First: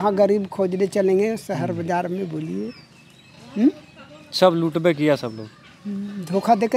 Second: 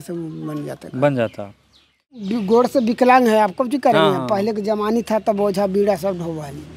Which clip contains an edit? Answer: second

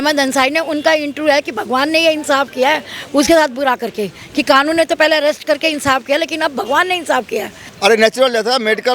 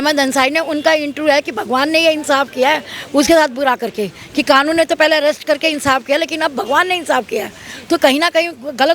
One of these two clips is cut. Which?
first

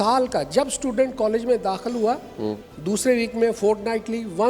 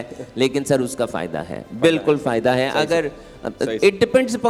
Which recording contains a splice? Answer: first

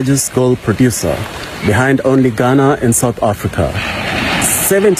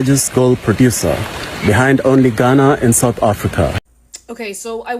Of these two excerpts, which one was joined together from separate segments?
second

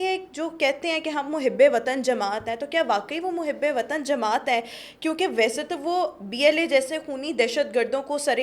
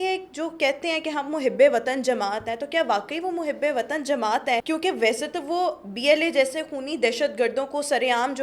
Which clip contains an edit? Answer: second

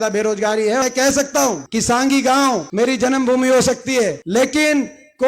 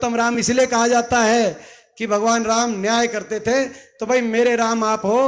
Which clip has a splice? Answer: first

